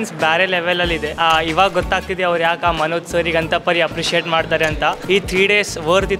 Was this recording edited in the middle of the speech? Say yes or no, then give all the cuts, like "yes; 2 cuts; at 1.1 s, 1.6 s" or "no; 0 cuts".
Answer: yes; 2 cuts; at 1.1 s, 5.0 s